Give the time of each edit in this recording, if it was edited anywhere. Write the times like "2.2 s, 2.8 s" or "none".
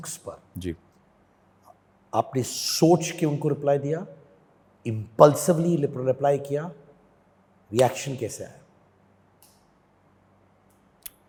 none